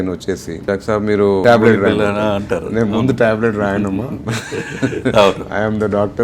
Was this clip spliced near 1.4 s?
yes; 1 cut; at 1.4 s

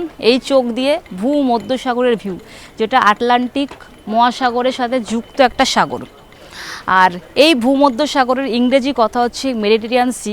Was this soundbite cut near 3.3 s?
no; 0 cuts

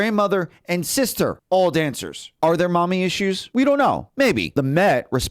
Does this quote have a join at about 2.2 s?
yes; 4 cuts; at 1.4 s, 2.2 s, 3.4 s, 4.2 s

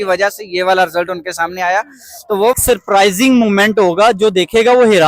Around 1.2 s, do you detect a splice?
no; 1 cut; at 2.5 s

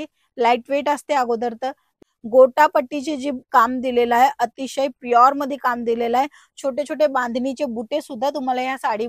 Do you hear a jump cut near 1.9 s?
yes; 1 cut; at 1.9 s

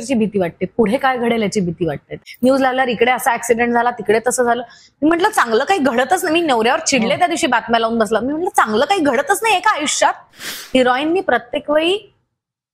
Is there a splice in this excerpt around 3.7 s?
no; 2 cuts; at 2.2 s, 10.5 s

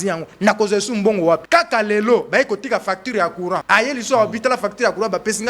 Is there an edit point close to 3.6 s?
yes; 2 cuts; at 1.4 s, 3.6 s

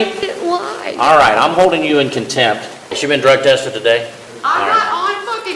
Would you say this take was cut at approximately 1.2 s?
no; 2 cuts; at 2.9 s, 4.2 s

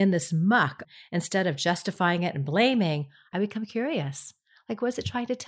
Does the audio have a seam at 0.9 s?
yes; 2 cuts; at 0.9 s, 3.3 s

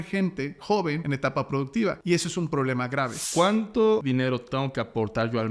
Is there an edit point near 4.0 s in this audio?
yes; 4 cuts; at 1.0 s, 2.0 s, 3.2 s, 4.0 s

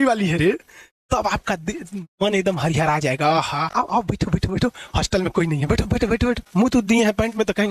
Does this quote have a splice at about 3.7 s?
yes; 2 cuts; at 3.7 s, 6.4 s

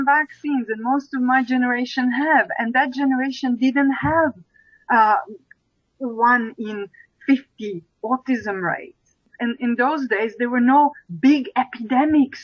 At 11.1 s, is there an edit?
no; 1 cut; at 9.3 s

